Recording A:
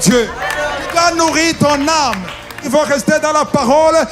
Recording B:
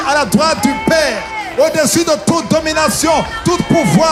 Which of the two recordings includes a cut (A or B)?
A